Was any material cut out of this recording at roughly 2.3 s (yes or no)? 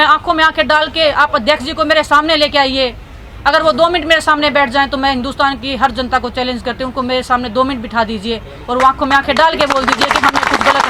no